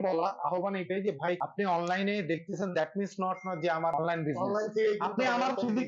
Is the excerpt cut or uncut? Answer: cut